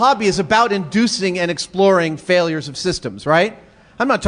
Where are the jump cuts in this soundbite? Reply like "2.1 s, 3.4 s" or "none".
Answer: 1.9 s